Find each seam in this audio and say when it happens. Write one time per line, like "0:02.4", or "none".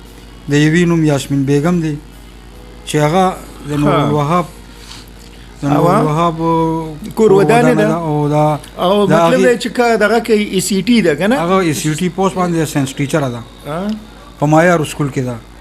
none